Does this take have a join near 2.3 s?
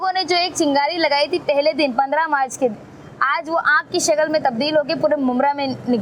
no; 0 cuts

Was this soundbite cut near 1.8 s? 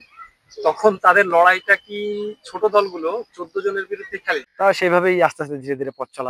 no; 1 cut; at 4.5 s

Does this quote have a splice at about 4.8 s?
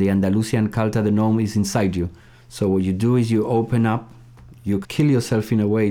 yes; 1 cut; at 4.8 s

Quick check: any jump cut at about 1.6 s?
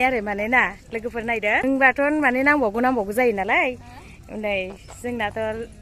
yes; 1 cut; at 1.6 s

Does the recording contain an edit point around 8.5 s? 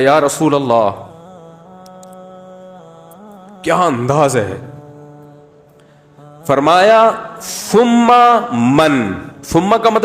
no; 4 cuts; at 1.1 s, 3.6 s, 4.7 s, 6.5 s

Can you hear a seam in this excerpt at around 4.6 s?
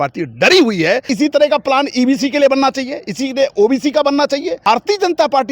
yes; 2 cuts; at 1.1 s, 4.6 s

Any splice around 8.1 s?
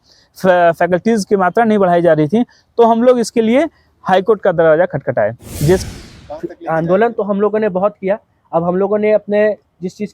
no; 1 cut; at 5.8 s

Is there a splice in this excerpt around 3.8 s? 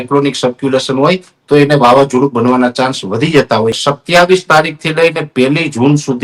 yes; 1 cut; at 3.8 s

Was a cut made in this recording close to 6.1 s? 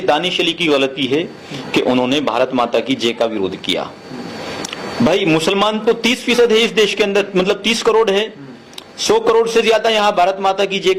no; 0 cuts

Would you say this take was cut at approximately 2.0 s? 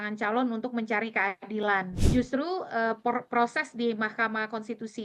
yes; 1 cut; at 2.0 s

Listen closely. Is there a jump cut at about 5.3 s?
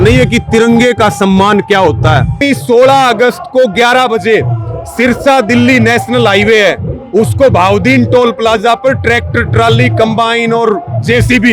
no; 1 cut; at 2.4 s

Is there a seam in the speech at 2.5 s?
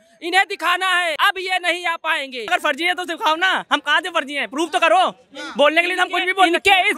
yes; 2 cuts; at 1.2 s, 2.5 s

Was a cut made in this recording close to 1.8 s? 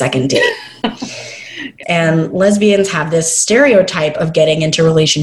yes; 1 cut; at 1.8 s

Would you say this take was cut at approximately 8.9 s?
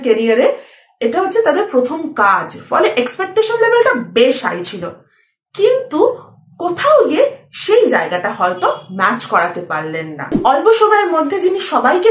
no; 1 cut; at 10.3 s

